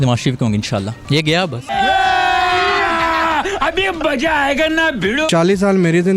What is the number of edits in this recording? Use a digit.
2